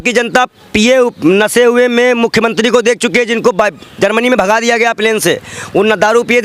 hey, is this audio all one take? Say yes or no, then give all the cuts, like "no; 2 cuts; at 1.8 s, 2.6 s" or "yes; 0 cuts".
yes; 0 cuts